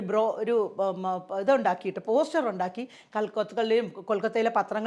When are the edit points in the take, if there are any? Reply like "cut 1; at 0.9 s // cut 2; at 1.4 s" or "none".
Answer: none